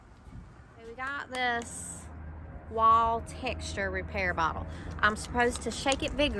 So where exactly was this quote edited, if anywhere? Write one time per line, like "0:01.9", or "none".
0:01.1